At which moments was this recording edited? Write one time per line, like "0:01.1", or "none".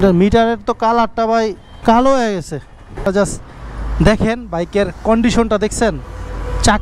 0:03.1